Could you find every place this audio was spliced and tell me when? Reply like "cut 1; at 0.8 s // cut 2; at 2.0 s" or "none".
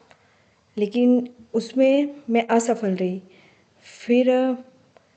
none